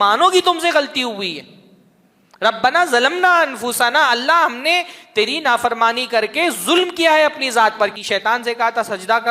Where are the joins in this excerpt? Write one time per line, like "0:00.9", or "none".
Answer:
0:08.0